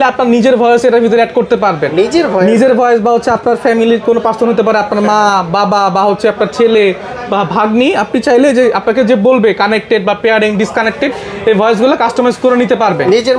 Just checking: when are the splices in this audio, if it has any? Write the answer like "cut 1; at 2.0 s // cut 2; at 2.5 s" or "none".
none